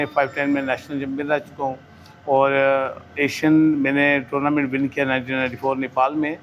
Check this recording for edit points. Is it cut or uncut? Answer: uncut